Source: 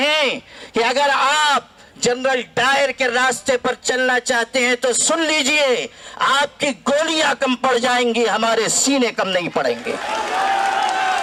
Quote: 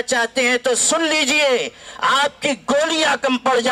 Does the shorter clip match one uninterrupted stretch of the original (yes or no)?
yes